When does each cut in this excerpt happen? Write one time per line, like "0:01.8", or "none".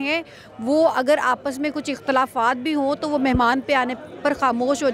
none